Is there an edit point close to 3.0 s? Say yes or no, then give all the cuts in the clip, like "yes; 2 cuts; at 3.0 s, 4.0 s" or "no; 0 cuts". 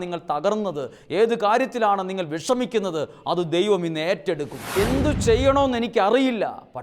no; 1 cut; at 4.7 s